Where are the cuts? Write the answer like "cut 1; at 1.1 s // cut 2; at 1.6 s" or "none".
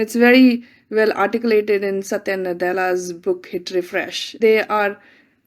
cut 1; at 4.4 s